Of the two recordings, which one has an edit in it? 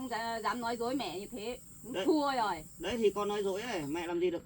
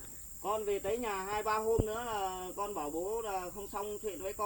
first; 1 cut; at 1.7 s

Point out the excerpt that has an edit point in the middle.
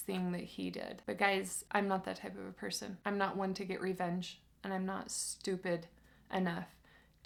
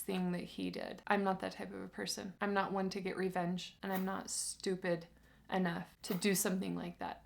second; 3 cuts; at 0.9 s, 3.7 s, 5.9 s

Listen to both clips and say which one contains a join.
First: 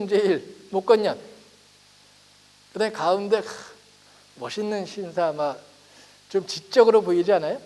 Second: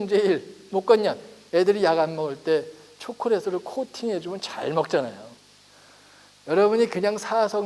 second; 1 cut; at 1.3 s

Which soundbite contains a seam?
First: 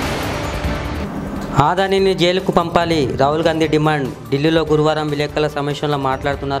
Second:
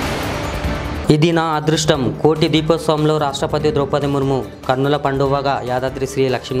first; 1 cut; at 0.9 s

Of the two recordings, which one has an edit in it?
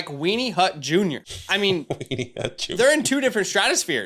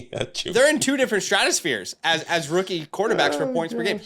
first; 1 cut; at 1.3 s

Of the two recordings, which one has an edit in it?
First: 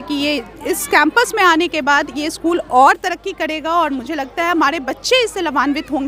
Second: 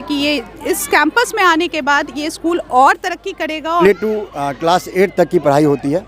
second; 1 cut; at 3.8 s

